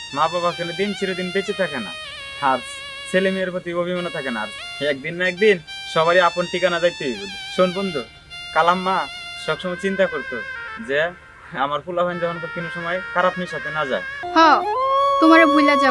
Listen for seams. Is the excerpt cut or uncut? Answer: cut